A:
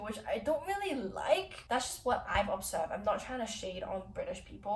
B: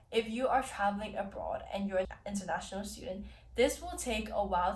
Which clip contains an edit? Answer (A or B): A